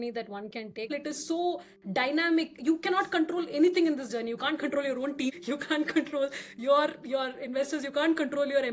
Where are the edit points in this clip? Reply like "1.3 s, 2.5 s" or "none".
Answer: 0.9 s, 5.3 s